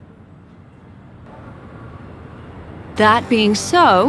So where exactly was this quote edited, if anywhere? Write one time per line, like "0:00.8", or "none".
0:01.3
0:03.0